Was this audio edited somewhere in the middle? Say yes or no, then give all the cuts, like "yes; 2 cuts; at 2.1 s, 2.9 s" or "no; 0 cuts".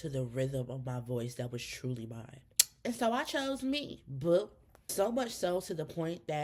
no; 0 cuts